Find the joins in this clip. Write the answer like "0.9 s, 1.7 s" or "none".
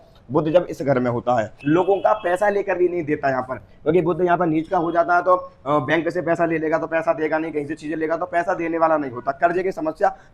1.5 s

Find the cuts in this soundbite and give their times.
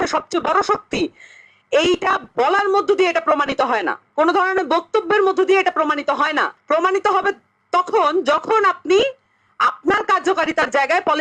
4.0 s, 6.6 s

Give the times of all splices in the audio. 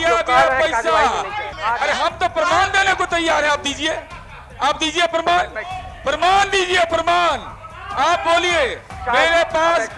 1.5 s, 8.9 s

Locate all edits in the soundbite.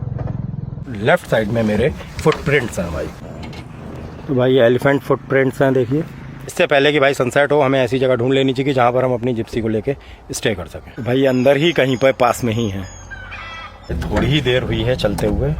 0.8 s, 6.5 s, 11.0 s, 13.9 s

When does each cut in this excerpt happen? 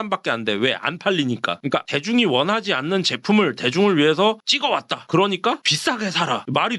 1.9 s

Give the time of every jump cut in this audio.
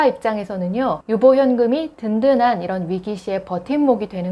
none

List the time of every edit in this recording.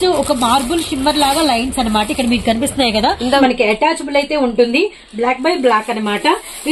3.4 s

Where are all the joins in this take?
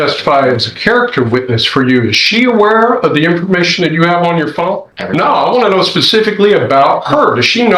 4.9 s

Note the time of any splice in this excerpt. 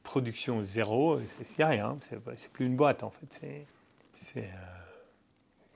none

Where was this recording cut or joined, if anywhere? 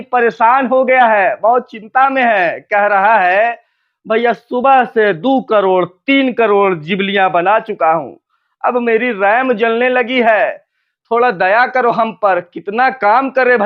none

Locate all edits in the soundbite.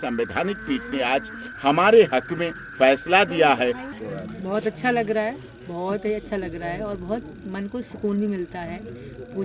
3.8 s

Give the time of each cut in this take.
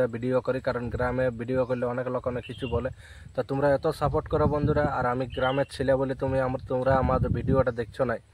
none

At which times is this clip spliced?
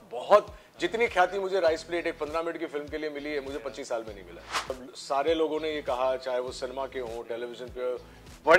4.7 s

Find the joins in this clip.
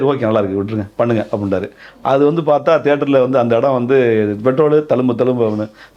none

